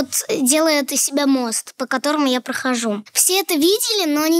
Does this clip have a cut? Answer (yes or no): yes